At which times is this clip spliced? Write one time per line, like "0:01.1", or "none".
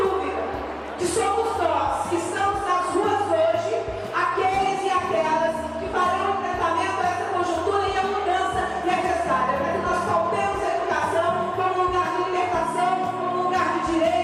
none

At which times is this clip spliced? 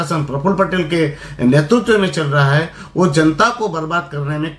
none

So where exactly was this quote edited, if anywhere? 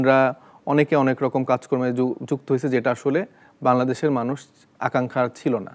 none

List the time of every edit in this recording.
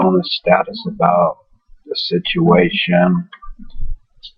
0:02.6

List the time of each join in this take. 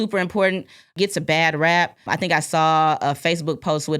0:00.9
0:02.1

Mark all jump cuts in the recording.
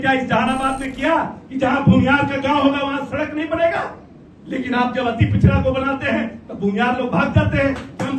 none

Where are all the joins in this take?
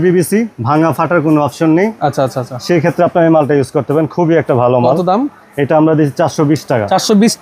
none

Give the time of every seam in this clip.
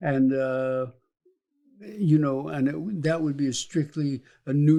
none

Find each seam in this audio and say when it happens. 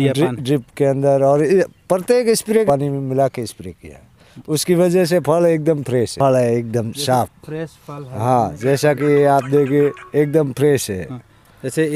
0:02.7
0:06.1

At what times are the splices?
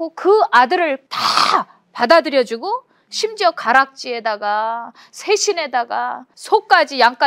0:01.1
0:06.3

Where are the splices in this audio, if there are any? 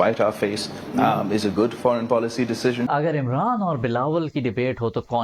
0:02.9

